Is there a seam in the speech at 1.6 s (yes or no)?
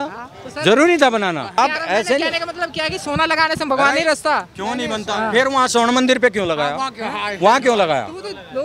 yes